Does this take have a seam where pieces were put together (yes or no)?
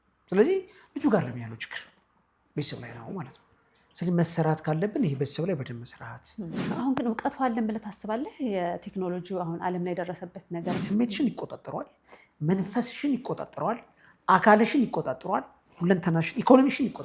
yes